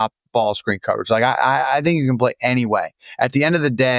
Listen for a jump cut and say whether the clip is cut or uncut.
uncut